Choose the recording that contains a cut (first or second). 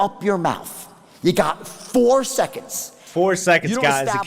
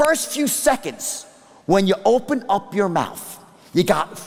first